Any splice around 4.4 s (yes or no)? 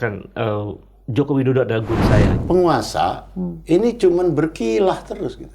no